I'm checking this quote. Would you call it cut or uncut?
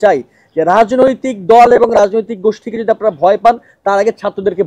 uncut